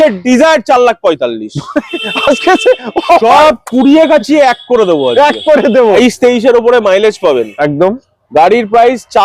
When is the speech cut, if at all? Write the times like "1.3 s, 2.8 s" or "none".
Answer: 6.0 s